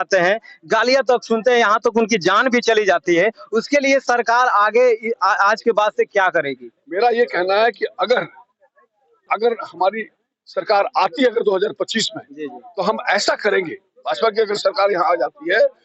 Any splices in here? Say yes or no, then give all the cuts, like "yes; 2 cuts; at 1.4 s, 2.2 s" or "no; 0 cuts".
yes; 1 cut; at 9.2 s